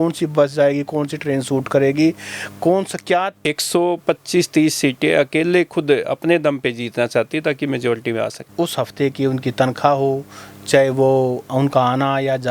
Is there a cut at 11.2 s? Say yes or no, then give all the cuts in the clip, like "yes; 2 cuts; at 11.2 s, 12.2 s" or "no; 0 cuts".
no; 2 cuts; at 3.4 s, 8.5 s